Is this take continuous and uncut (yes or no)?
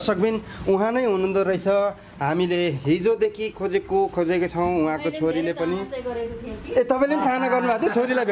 yes